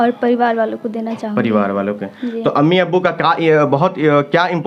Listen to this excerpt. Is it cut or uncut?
uncut